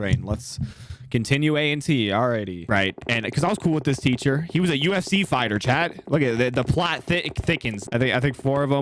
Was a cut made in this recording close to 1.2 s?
no; 2 cuts; at 2.6 s, 7.8 s

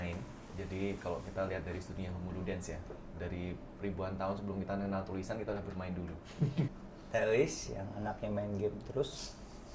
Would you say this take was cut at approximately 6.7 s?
yes; 1 cut; at 6.7 s

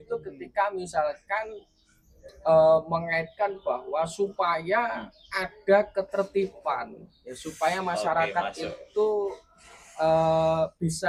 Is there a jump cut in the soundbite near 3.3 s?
no; 0 cuts

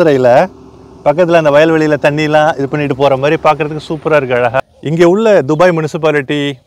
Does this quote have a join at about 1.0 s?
no; 1 cut; at 4.6 s

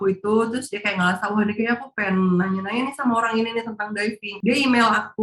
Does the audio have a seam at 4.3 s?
yes; 1 cut; at 4.3 s

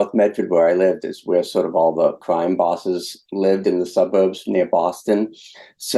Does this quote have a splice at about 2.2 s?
yes; 2 cuts; at 2.2 s, 3.2 s

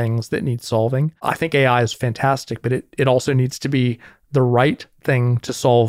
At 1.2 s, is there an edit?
yes; 1 cut; at 1.2 s

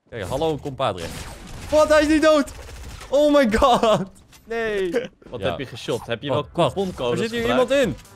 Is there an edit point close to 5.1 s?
yes; 1 cut; at 5.1 s

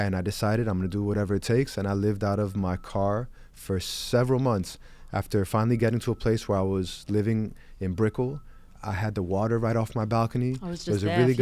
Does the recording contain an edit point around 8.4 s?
no; 0 cuts

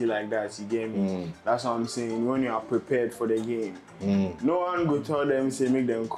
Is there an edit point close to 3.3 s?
no; 0 cuts

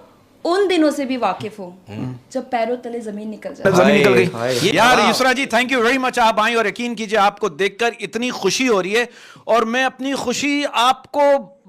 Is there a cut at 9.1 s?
no; 1 cut; at 4.7 s

